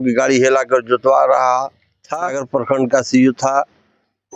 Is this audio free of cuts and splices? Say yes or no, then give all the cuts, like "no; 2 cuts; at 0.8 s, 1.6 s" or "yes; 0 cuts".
no; 1 cut; at 2.4 s